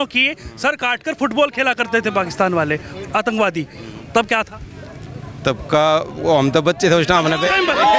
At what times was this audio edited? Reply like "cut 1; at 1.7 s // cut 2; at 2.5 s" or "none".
none